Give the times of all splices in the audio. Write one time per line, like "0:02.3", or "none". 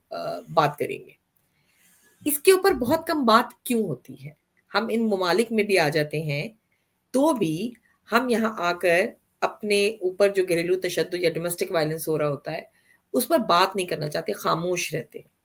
none

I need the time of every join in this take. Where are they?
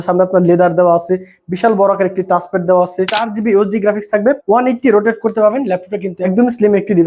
0:03.2
0:04.4
0:06.3

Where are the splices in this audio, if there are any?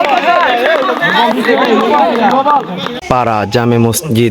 0:02.9

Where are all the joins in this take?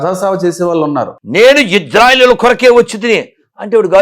0:01.2

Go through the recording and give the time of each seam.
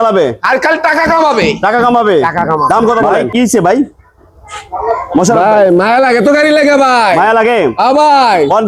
0:03.2

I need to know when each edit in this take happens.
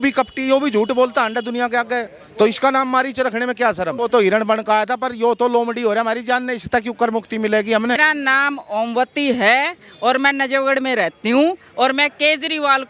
0:03.9
0:08.0

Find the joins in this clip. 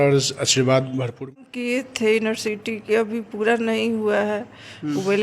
0:01.3

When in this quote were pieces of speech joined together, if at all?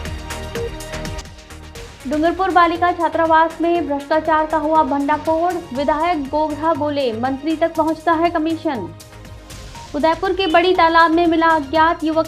0:01.0

